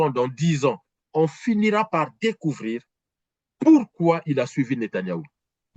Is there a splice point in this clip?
no; 0 cuts

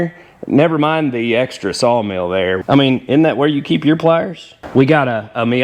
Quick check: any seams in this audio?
yes; 2 cuts; at 2.6 s, 4.6 s

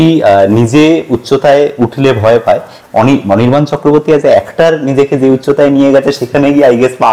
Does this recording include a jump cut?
no; 0 cuts

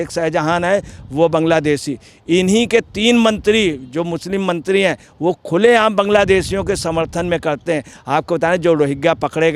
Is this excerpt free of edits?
yes; 0 cuts

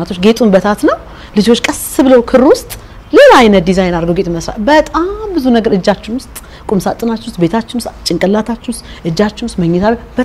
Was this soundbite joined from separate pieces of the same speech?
no; 0 cuts

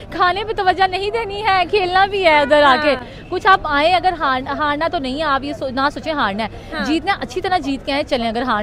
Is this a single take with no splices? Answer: yes; 0 cuts

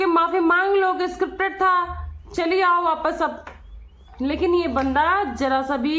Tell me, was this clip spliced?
no; 0 cuts

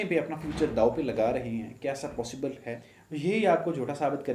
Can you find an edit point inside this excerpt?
yes; 1 cut; at 2.9 s

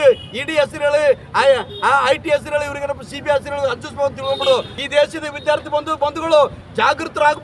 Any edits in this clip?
yes; 1 cut; at 4.8 s

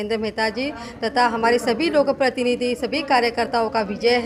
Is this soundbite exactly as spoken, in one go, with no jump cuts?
yes; 0 cuts

